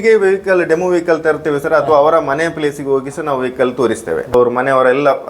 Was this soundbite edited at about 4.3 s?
yes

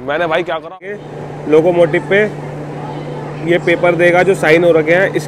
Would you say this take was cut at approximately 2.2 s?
no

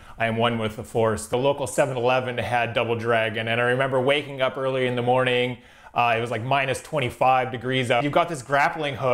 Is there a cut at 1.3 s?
yes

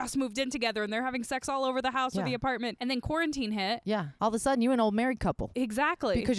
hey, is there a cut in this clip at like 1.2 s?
no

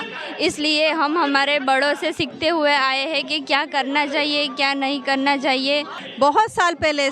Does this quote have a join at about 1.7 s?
no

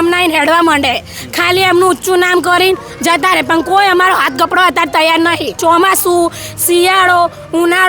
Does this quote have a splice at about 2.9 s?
no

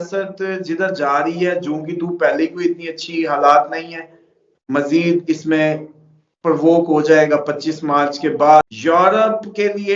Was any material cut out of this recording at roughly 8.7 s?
yes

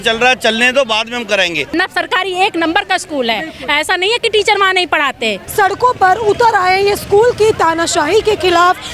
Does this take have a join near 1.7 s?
yes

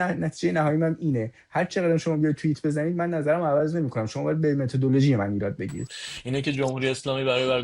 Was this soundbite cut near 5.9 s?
yes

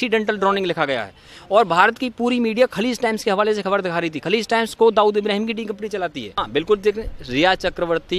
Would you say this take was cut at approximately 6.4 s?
yes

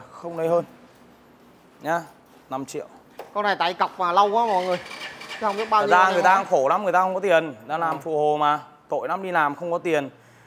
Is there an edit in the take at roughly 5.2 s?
no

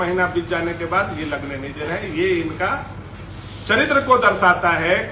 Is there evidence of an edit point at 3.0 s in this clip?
no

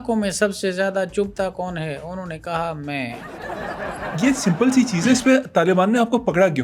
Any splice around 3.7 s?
yes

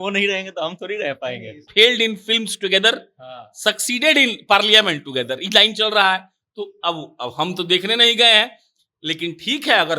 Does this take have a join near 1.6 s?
yes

